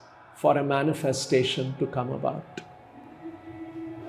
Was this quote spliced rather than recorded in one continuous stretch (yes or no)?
no